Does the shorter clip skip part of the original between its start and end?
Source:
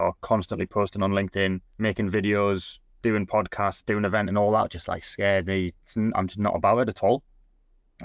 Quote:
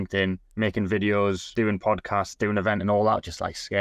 yes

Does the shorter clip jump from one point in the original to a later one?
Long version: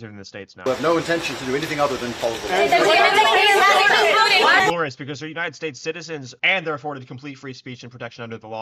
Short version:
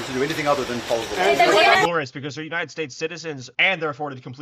yes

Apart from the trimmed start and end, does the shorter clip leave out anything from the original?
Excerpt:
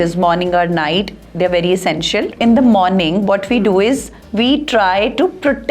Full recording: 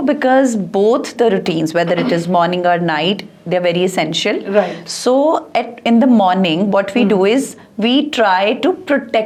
yes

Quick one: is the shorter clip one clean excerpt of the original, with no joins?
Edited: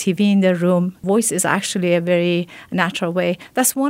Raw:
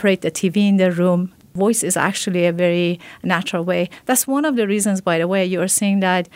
no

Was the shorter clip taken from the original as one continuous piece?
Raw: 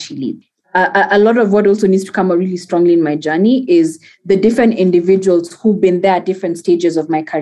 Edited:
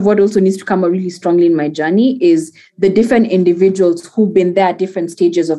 yes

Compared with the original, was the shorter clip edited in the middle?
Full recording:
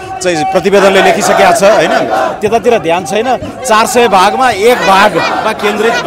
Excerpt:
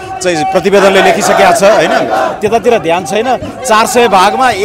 no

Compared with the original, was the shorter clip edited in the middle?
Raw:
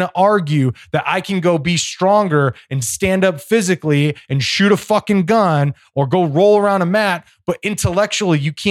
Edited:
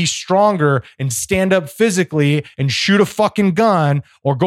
no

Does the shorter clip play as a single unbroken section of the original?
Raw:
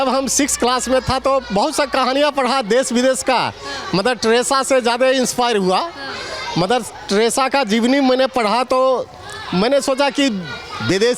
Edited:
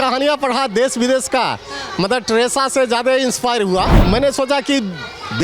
no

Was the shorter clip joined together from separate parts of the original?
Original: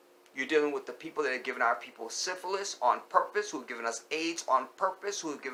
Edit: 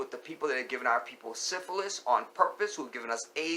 no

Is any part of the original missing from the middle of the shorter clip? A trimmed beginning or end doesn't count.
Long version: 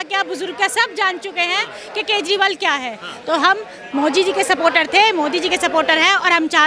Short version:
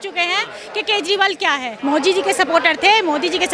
yes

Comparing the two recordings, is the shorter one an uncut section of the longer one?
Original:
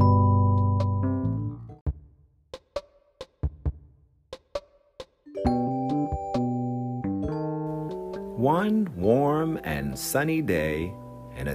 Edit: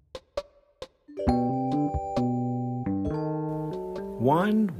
no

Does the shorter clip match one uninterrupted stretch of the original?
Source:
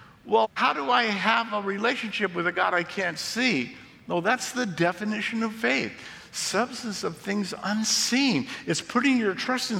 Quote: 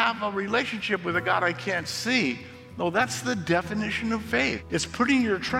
no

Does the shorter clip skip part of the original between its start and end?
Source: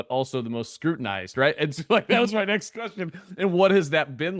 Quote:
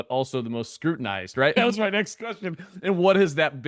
yes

